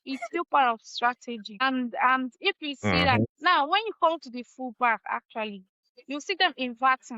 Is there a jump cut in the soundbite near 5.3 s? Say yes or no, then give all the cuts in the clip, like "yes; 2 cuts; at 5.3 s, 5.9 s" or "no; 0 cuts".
no; 2 cuts; at 1.6 s, 3.1 s